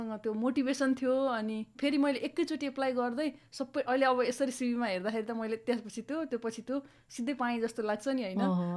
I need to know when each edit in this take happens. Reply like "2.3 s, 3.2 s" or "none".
1.8 s